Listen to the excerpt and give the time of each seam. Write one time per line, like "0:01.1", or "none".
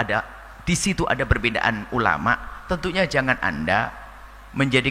none